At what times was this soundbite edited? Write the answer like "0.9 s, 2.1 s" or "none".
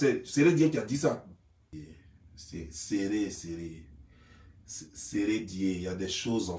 1.7 s